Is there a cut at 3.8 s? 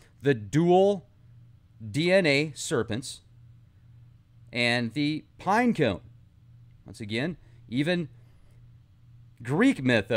yes; 1 cut; at 3.8 s

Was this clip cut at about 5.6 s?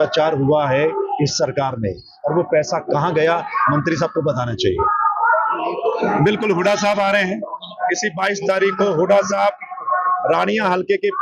yes; 1 cut; at 5.6 s

